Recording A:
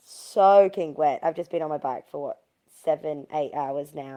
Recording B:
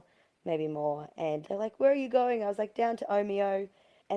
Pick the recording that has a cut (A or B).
B